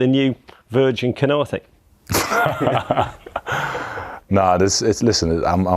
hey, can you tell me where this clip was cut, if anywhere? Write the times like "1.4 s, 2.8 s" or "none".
4.1 s

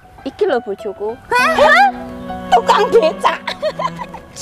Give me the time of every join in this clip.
1.2 s

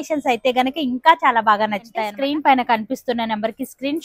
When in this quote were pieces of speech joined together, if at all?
2.0 s

